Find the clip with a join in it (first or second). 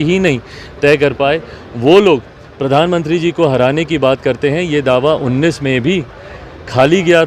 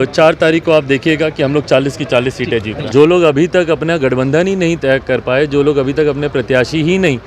second